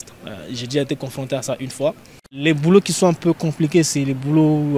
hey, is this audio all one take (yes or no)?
no